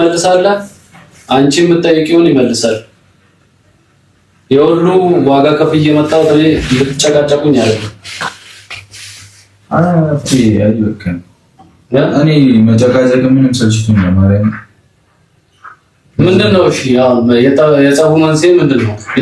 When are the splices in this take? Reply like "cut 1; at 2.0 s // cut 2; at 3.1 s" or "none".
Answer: none